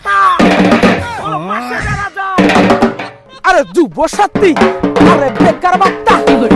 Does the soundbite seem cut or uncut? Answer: uncut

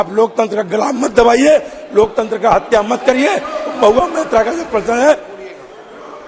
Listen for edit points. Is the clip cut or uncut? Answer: uncut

